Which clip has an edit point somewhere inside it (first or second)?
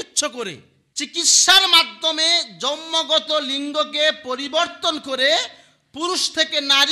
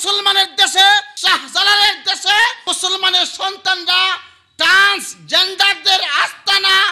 second